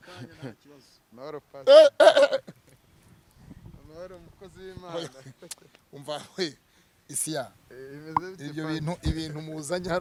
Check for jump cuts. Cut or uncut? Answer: uncut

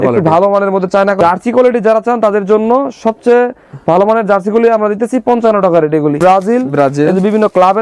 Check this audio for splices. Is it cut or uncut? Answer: cut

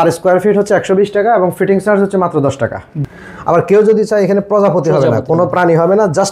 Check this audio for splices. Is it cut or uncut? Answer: cut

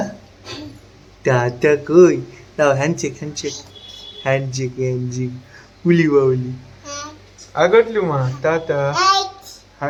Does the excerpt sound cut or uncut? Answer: uncut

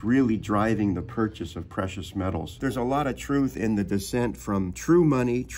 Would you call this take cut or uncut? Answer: cut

